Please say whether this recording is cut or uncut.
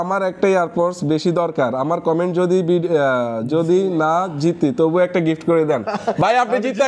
uncut